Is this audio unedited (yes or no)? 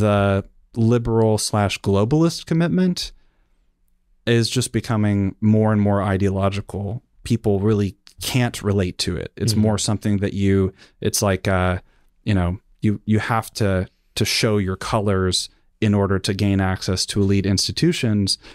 yes